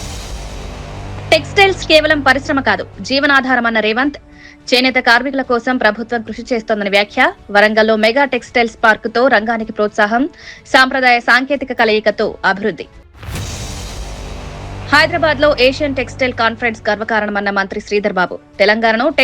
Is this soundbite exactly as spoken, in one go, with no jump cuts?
no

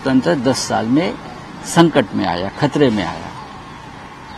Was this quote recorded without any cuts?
yes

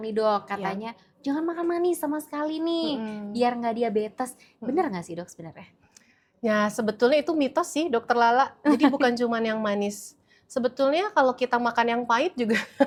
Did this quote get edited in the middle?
no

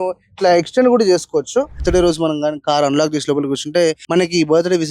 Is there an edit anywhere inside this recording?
yes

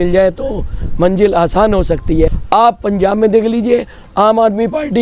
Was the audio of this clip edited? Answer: yes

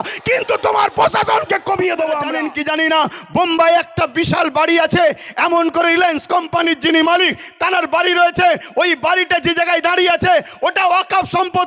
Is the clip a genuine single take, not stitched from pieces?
no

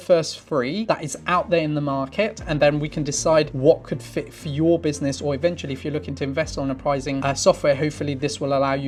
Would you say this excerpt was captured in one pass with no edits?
yes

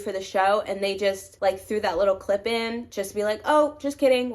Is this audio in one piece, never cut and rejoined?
no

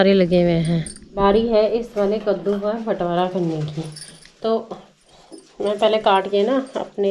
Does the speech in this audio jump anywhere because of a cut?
yes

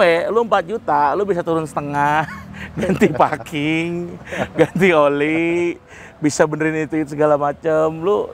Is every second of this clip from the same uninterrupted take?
yes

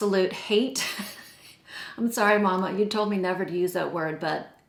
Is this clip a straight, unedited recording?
yes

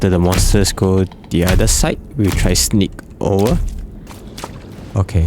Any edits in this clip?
yes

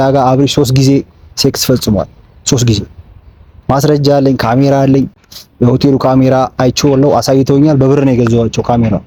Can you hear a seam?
no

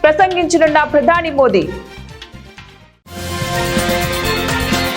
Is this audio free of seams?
no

